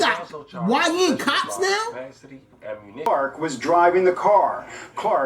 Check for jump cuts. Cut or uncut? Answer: cut